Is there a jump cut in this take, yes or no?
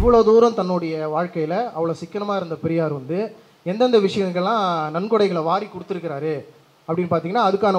no